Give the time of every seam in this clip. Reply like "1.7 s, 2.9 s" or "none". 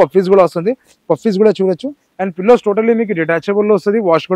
none